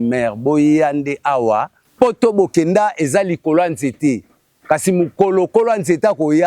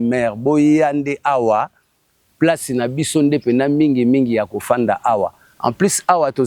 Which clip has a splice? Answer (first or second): first